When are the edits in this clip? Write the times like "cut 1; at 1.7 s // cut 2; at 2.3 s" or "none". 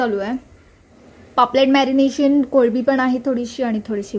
none